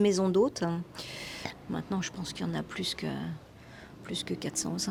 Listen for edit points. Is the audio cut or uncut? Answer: uncut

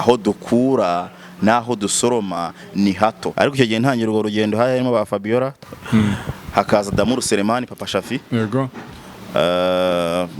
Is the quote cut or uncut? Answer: cut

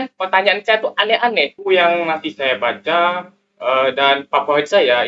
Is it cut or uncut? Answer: cut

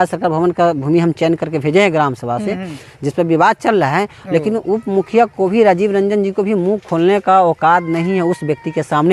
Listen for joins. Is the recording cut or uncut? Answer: uncut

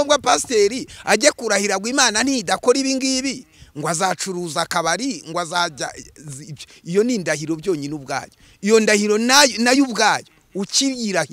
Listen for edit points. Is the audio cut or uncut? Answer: uncut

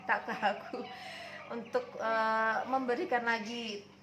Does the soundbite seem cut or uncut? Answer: uncut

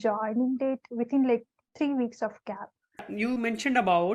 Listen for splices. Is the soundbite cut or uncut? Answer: cut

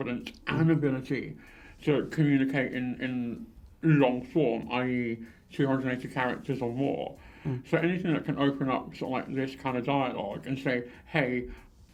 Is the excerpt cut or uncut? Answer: uncut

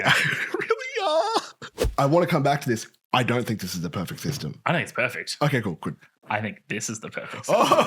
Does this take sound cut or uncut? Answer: cut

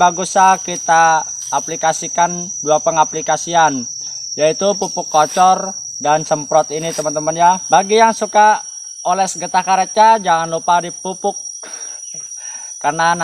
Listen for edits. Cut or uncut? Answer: cut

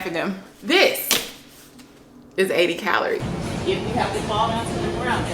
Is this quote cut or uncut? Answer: cut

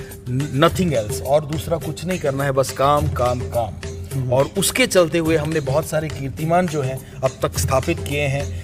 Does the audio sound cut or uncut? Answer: uncut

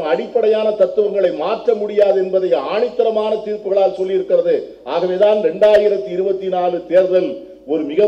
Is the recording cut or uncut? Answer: uncut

